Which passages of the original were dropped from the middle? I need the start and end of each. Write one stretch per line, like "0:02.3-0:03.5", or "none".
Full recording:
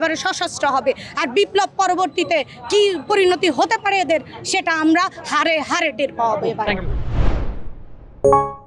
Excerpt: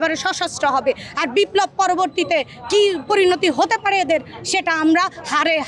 none